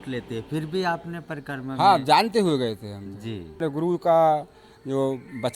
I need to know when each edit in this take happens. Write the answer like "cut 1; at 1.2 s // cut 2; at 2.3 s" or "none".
cut 1; at 3.6 s